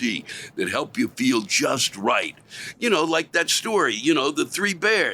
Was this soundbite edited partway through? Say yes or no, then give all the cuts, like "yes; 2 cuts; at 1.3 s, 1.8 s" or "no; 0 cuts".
no; 0 cuts